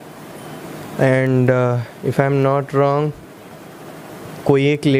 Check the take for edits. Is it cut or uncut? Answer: uncut